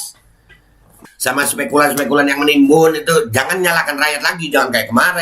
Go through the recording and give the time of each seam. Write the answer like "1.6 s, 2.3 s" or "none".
0.9 s